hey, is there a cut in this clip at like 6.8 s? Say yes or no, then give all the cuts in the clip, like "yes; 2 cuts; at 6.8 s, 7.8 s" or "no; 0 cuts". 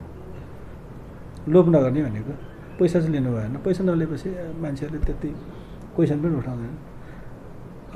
no; 0 cuts